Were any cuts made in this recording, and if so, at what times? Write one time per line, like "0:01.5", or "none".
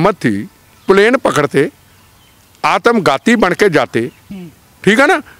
none